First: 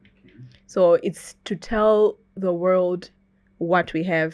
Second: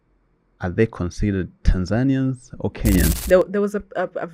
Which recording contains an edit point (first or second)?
second